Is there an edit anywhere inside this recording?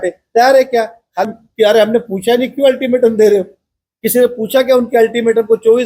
yes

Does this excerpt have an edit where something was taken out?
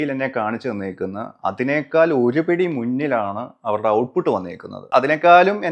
yes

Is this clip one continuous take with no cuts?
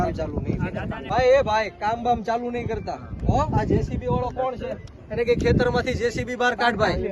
no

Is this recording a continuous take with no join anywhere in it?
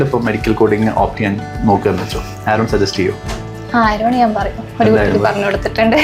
yes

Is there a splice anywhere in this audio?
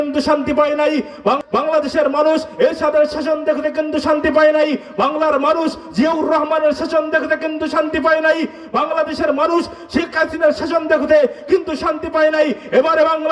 yes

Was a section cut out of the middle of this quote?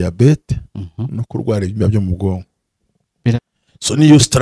yes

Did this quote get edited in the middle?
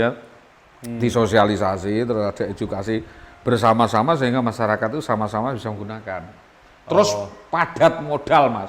no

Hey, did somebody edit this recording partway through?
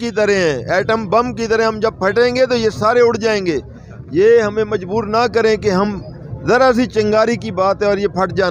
no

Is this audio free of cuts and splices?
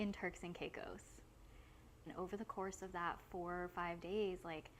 no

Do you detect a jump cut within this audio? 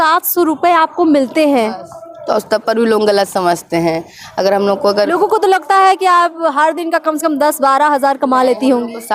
no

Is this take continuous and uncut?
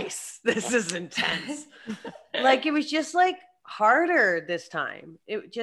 yes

